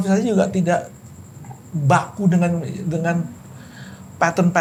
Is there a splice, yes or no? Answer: no